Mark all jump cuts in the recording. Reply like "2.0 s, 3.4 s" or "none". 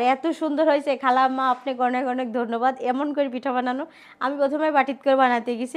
none